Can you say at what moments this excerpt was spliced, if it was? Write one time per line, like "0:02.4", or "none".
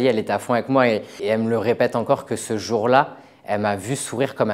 0:01.1